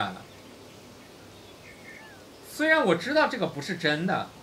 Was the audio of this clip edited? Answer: yes; 1 cut; at 1.9 s

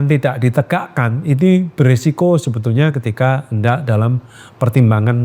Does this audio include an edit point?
no; 0 cuts

